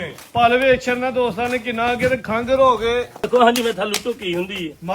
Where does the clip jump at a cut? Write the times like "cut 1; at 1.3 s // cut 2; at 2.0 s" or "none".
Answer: cut 1; at 3.3 s

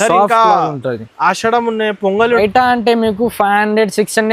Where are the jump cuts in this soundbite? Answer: cut 1; at 2.4 s

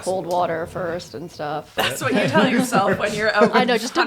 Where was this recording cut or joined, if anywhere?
cut 1; at 1.7 s

